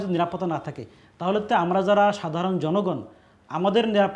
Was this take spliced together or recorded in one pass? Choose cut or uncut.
uncut